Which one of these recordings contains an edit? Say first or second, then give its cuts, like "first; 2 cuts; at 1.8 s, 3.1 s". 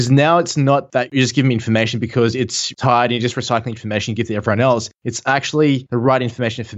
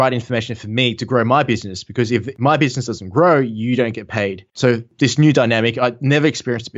first; 1 cut; at 2.7 s